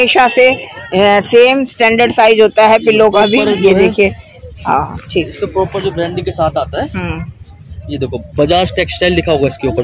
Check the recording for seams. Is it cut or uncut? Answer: uncut